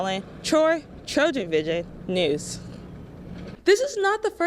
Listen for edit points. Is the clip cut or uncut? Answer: cut